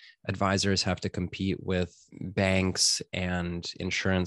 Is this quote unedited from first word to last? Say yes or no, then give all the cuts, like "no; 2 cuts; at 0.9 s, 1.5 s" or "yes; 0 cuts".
no; 1 cut; at 2.0 s